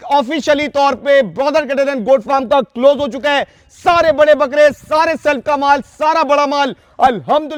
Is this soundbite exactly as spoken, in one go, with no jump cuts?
yes; 0 cuts

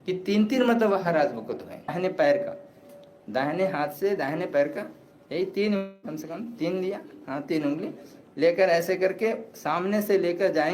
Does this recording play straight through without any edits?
no; 1 cut; at 1.9 s

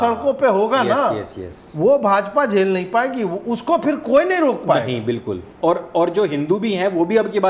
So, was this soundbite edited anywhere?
no; 0 cuts

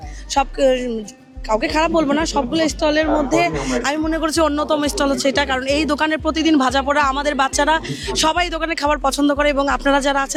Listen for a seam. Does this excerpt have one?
no; 0 cuts

